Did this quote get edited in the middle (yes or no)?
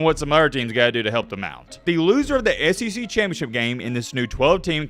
yes